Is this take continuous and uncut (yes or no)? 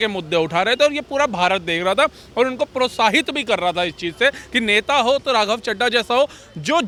yes